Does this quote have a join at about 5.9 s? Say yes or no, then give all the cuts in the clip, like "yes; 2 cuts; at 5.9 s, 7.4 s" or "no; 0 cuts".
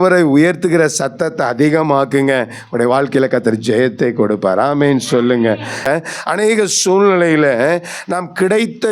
yes; 1 cut; at 5.9 s